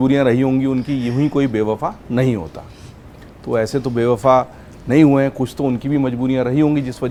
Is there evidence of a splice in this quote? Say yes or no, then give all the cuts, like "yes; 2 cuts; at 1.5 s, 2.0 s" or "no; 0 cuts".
no; 0 cuts